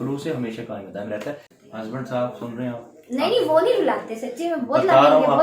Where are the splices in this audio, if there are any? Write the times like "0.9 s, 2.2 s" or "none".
1.5 s